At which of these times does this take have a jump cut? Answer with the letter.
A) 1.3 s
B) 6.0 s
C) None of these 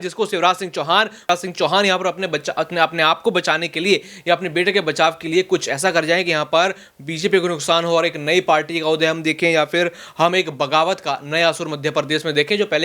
A